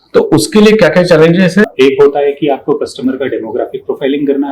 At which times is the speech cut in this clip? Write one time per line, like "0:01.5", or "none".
0:01.6